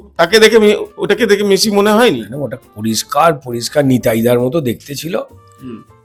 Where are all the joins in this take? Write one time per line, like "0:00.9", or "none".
none